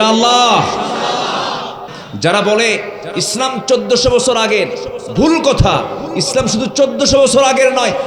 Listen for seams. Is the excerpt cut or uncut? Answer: cut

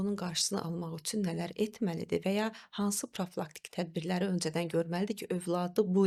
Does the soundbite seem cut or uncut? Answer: uncut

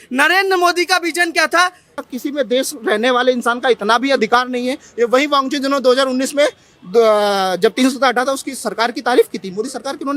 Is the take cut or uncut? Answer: cut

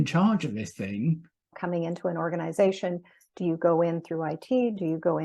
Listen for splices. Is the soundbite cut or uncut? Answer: cut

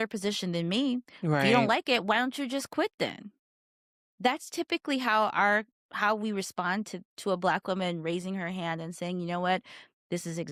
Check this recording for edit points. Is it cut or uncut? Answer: uncut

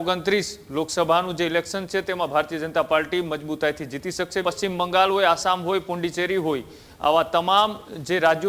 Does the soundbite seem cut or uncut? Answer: cut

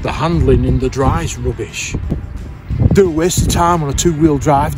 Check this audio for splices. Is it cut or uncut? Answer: cut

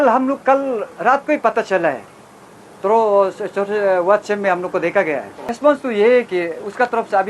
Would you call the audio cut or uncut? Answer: cut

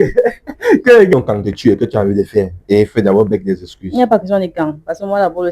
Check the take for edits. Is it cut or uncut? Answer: cut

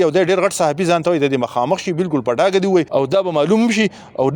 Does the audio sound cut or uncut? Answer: cut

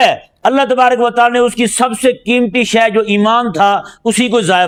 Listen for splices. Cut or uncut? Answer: uncut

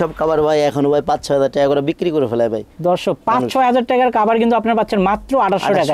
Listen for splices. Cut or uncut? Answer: uncut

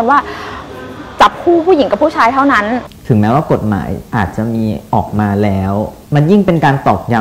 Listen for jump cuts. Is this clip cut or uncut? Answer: cut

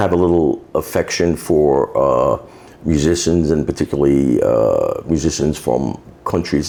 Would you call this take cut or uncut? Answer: uncut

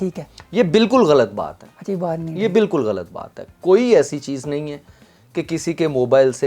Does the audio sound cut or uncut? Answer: uncut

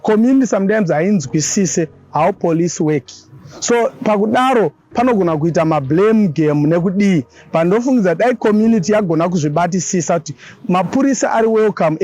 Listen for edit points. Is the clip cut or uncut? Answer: uncut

